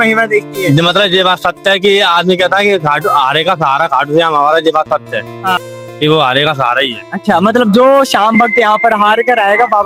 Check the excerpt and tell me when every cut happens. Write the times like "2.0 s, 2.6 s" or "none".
none